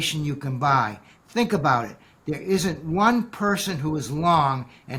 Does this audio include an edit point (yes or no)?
no